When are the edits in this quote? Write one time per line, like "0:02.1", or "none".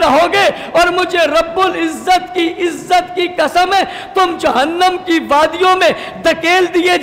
none